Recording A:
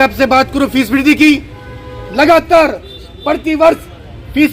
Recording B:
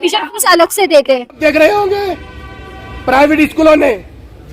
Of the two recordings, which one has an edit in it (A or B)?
B